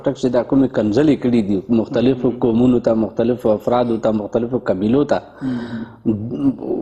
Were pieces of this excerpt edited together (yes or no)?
no